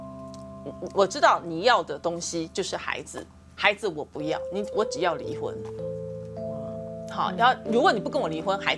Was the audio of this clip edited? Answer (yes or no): no